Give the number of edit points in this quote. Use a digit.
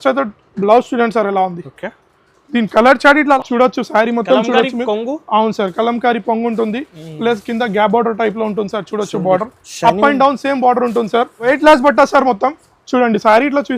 2